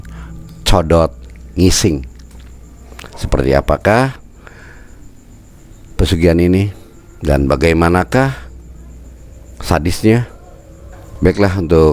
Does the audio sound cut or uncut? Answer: uncut